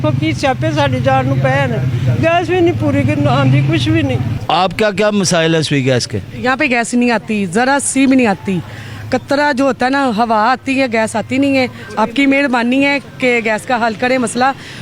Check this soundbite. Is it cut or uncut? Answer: uncut